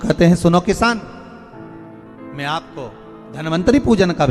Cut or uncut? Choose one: cut